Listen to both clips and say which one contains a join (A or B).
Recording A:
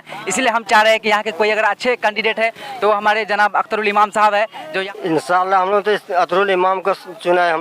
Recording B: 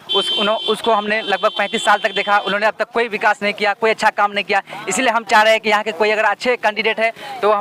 A